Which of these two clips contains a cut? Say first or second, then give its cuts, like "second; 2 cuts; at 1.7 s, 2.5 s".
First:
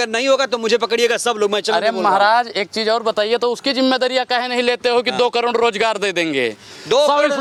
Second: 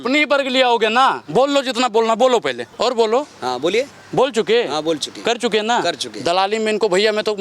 second; 1 cut; at 2.7 s